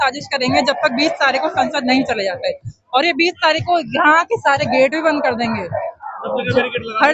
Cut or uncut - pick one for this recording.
uncut